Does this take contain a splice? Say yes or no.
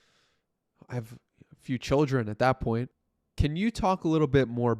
yes